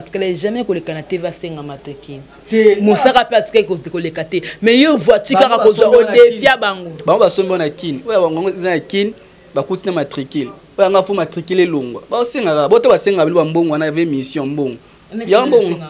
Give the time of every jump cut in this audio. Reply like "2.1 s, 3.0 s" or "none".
none